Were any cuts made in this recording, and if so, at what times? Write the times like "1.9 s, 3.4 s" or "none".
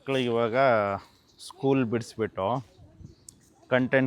none